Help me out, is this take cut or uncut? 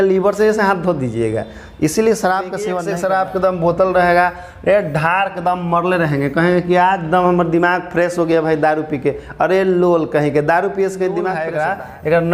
cut